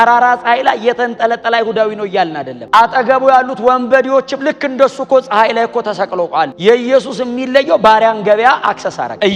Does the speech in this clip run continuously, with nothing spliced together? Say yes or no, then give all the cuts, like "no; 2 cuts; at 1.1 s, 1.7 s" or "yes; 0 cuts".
yes; 0 cuts